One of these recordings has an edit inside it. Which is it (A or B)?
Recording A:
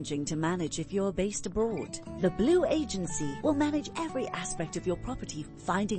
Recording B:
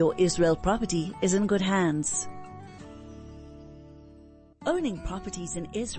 B